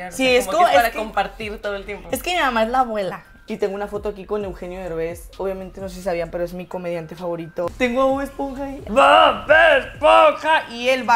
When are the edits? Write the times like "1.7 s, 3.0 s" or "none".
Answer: 3.3 s, 7.7 s, 8.8 s